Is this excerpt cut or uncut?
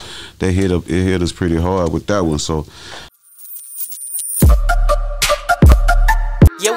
cut